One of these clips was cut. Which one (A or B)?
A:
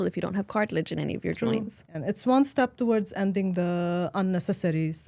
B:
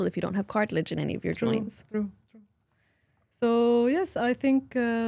A